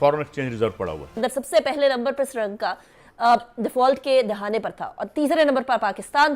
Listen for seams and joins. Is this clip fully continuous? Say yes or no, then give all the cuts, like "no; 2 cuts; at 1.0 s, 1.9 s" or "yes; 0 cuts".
no; 1 cut; at 1.0 s